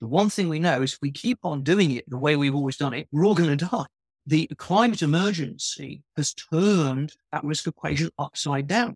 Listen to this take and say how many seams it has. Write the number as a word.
one